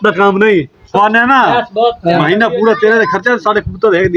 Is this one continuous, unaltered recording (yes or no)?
no